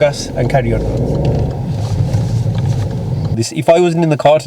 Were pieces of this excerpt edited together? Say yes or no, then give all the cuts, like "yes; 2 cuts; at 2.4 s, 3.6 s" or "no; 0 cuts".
yes; 1 cut; at 3.4 s